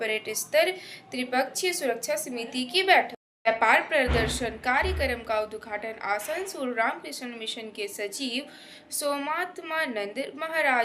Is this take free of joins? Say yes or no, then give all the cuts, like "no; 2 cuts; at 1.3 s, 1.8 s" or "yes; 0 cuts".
no; 1 cut; at 3.2 s